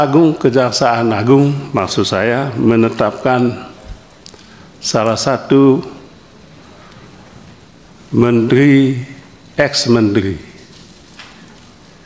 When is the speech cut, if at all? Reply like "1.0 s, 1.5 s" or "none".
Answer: none